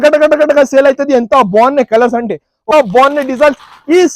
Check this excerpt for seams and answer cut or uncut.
cut